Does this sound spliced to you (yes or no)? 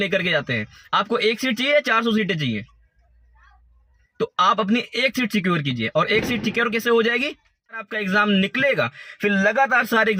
yes